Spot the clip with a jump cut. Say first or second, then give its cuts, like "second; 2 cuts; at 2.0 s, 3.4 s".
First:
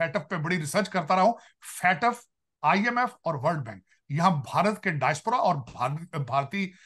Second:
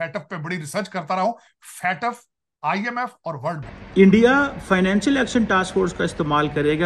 second; 1 cut; at 3.9 s